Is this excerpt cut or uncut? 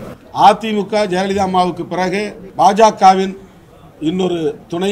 cut